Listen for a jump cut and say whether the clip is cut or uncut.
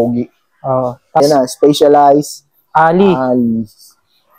cut